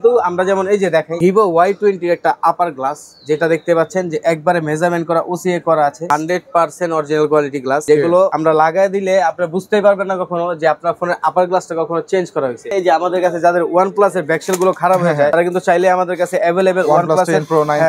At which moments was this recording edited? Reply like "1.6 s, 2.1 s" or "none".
1.1 s, 6.1 s, 8.1 s, 12.7 s, 15.3 s